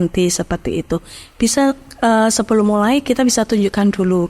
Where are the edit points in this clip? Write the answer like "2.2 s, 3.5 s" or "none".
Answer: none

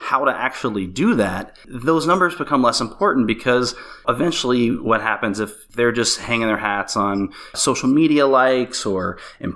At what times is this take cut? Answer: 1.7 s, 4.0 s, 5.6 s, 7.6 s

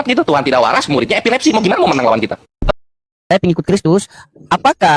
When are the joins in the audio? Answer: 3.1 s

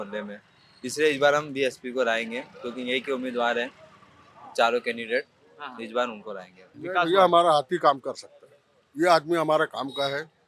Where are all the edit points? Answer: 6.8 s

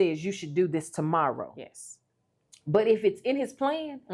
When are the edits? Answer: none

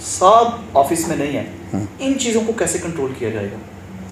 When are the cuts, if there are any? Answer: none

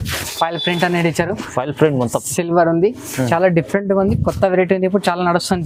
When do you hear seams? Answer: none

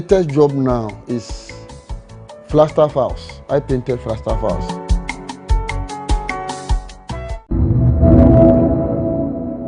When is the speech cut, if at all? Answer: 7.4 s

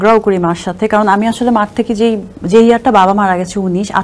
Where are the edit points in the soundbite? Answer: 2.3 s

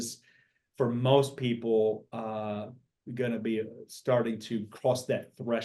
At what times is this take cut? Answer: none

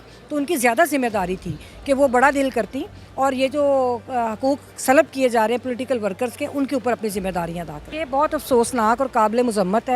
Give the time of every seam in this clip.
7.9 s

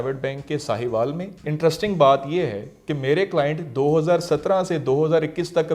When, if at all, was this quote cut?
1.4 s

